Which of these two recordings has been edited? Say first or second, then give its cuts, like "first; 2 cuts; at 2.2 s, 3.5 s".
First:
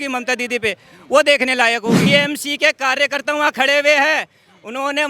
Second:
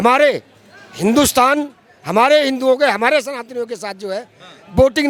first; 1 cut; at 2.0 s